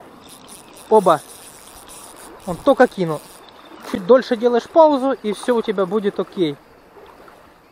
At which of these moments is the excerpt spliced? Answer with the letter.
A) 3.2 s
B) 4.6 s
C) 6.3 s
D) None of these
D